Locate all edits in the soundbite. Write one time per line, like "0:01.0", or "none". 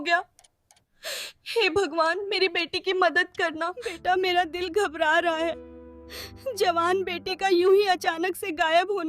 0:03.8